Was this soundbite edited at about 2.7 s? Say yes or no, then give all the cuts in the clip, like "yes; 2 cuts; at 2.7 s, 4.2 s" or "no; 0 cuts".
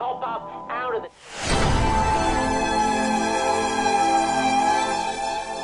no; 1 cut; at 1.1 s